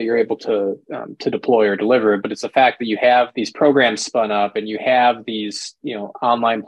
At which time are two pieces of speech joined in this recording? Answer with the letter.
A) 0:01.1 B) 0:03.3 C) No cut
B